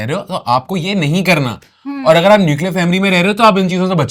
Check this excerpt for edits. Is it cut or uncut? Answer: uncut